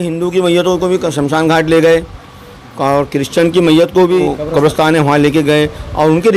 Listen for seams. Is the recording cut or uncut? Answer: cut